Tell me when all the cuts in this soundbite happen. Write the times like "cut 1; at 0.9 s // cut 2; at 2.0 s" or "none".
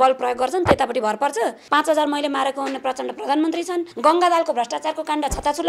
cut 1; at 1.6 s // cut 2; at 3.9 s